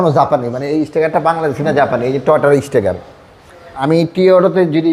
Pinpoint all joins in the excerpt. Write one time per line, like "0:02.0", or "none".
0:03.7